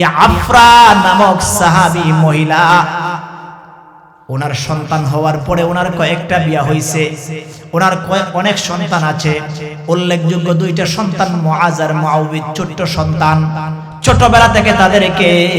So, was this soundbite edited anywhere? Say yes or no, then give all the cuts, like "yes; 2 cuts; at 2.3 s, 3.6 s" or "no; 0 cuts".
no; 0 cuts